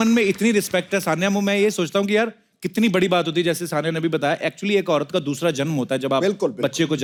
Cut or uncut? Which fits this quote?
uncut